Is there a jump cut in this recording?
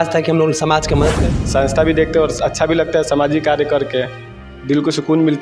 yes; 1 cut; at 1.2 s

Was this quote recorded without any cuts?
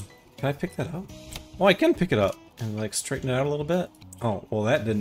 no; 2 cuts; at 2.5 s, 4.0 s

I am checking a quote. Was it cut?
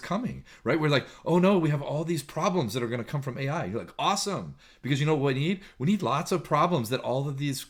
no; 0 cuts

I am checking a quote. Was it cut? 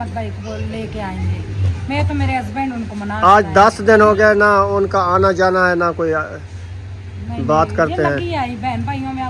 no; 0 cuts

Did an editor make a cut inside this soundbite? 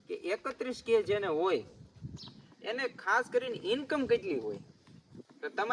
no; 0 cuts

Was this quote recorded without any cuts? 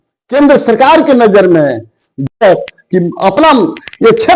no; 1 cut; at 2.3 s

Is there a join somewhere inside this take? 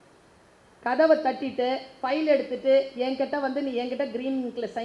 no; 0 cuts

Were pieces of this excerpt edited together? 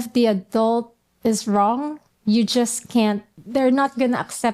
yes; 1 cut; at 3.3 s

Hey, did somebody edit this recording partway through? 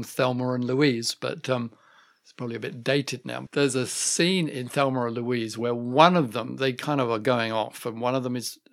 yes; 1 cut; at 3.4 s

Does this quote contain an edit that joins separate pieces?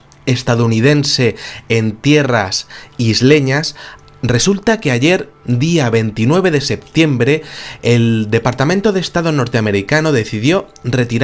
no; 0 cuts

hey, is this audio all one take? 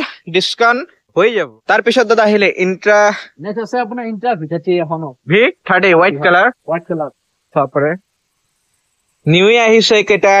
yes; 0 cuts

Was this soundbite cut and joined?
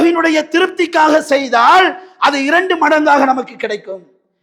no; 0 cuts

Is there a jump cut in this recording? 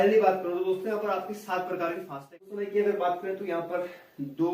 yes; 1 cut; at 2.3 s

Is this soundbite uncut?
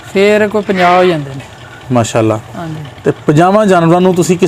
yes; 0 cuts

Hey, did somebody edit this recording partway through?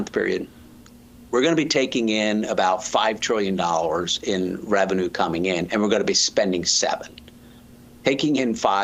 no; 0 cuts

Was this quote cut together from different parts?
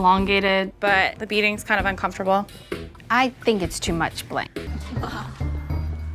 yes; 1 cut; at 4.7 s

